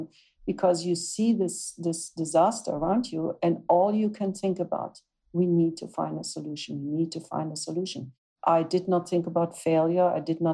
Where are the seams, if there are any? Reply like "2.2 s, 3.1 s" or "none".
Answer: 8.2 s